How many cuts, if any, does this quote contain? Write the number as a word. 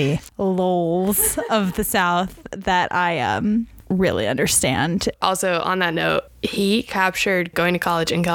two